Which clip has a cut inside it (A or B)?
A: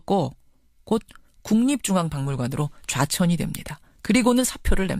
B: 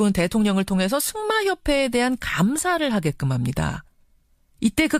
A